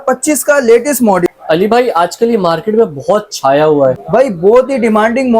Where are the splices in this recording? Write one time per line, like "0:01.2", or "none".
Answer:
0:01.3
0:04.0

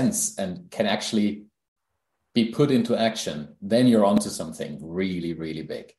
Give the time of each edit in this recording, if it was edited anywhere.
none

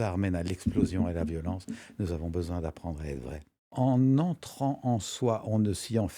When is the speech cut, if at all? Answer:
0:03.6

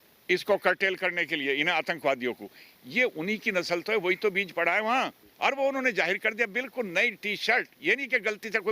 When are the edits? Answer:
0:05.2

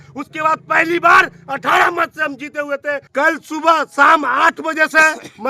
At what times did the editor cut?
0:03.0

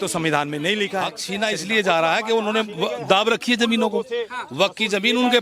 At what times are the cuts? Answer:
0:01.2

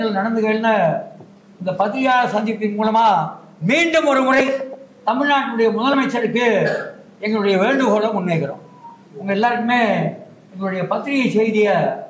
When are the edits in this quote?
none

